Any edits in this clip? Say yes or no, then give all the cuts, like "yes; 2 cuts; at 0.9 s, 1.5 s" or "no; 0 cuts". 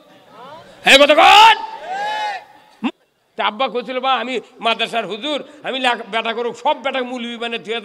yes; 1 cut; at 2.9 s